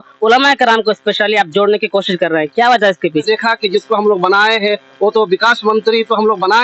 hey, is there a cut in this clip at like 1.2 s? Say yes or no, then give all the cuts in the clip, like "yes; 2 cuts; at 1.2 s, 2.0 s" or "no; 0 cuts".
no; 1 cut; at 3.2 s